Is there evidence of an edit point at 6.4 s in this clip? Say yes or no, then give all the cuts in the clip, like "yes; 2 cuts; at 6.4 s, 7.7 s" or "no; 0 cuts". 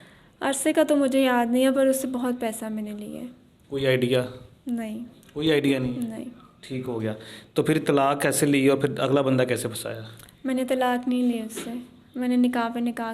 no; 0 cuts